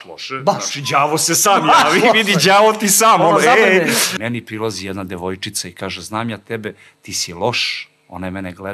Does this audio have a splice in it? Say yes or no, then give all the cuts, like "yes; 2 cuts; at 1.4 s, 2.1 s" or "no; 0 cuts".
yes; 1 cut; at 4.1 s